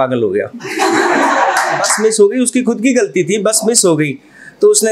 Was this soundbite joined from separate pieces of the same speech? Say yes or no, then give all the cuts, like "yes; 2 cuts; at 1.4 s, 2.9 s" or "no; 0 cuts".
yes; 1 cut; at 1.9 s